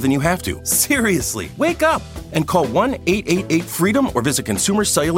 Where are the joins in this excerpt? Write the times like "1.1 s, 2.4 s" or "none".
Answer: 1.0 s